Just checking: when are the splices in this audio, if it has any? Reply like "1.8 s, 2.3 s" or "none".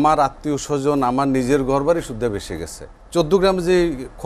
3.1 s